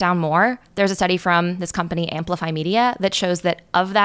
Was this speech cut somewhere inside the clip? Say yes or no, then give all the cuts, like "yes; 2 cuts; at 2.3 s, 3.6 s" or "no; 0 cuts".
no; 0 cuts